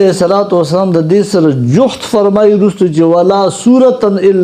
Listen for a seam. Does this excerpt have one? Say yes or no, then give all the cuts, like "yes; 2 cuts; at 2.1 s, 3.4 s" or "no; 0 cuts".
no; 0 cuts